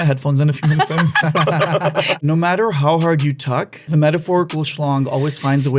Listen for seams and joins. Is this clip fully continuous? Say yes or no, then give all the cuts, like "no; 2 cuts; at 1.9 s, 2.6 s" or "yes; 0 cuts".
no; 2 cuts; at 2.2 s, 3.8 s